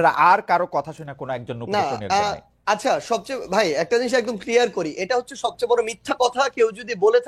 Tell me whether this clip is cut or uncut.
uncut